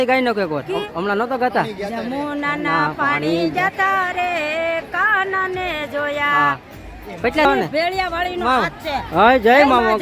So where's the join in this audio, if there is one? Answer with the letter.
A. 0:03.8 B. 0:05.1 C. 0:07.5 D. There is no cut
C